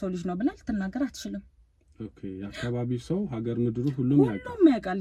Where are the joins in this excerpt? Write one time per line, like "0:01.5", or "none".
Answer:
none

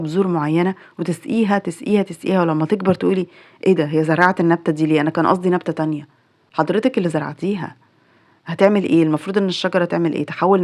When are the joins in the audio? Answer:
none

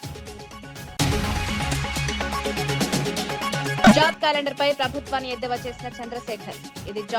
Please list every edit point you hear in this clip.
0:00.9
0:03.8

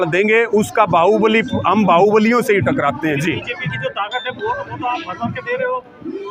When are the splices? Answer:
none

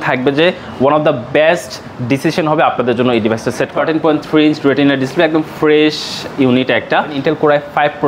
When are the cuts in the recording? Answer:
0:03.7
0:07.2

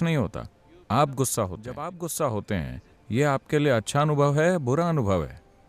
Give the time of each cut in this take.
0:01.9

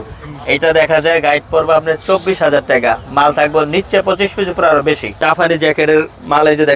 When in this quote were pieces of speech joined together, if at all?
0:05.1

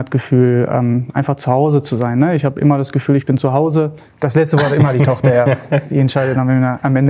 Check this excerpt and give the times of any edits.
0:04.0

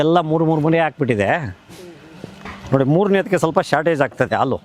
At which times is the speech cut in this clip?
none

